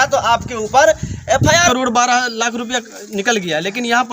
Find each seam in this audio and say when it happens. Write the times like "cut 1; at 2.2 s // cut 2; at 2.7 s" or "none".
cut 1; at 1.7 s